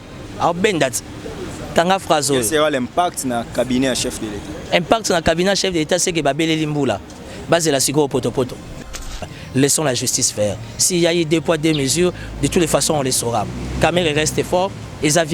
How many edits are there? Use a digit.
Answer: 1